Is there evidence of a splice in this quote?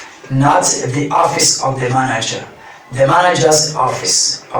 no; 0 cuts

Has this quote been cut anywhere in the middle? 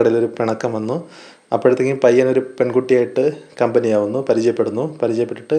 no; 0 cuts

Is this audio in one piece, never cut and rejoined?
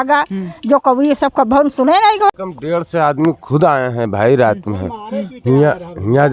no; 1 cut; at 2.4 s

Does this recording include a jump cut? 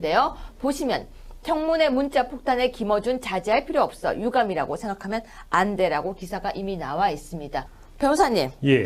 no; 0 cuts

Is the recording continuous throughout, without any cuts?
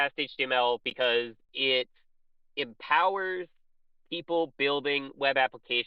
yes; 0 cuts

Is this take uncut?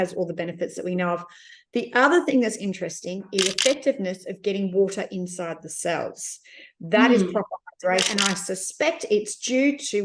no; 2 cuts; at 3.4 s, 8.1 s

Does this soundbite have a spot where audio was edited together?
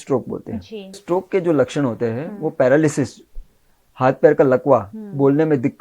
yes; 1 cut; at 1.0 s

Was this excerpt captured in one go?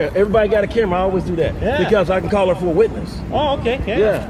yes; 0 cuts

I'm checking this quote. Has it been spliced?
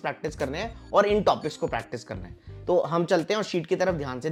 no; 0 cuts

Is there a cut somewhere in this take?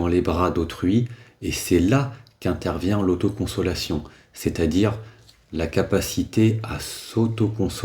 no; 0 cuts

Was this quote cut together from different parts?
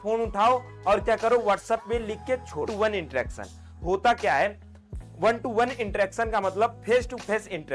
yes; 1 cut; at 2.7 s

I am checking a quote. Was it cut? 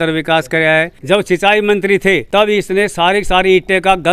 yes; 2 cuts; at 1.0 s, 2.2 s

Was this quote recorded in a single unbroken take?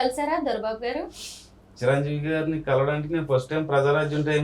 yes; 0 cuts

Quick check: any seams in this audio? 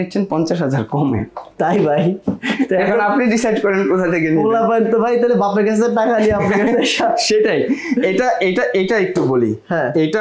no; 0 cuts

